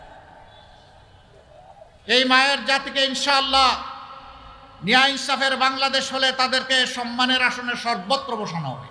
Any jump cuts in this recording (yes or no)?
no